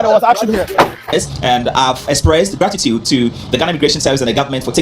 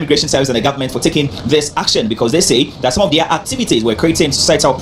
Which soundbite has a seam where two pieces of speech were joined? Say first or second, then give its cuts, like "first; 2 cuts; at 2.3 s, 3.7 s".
first; 1 cut; at 1.1 s